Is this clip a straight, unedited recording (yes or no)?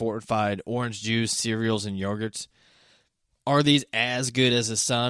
yes